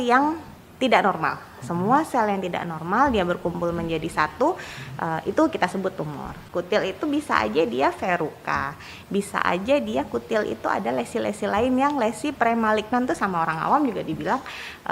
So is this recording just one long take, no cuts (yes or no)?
no